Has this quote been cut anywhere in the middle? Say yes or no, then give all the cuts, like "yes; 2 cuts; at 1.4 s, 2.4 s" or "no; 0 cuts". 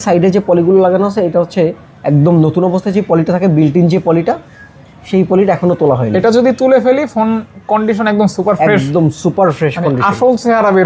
no; 0 cuts